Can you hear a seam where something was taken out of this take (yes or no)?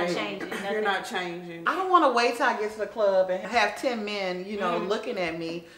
yes